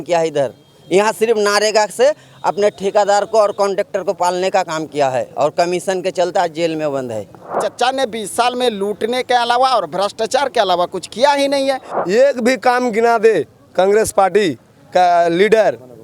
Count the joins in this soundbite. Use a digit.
2